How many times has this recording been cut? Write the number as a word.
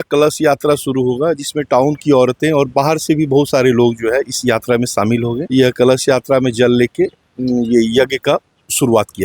zero